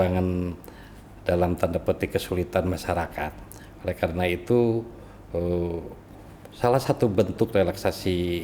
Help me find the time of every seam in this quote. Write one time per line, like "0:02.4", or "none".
none